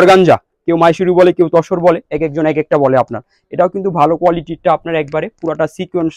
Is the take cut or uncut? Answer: uncut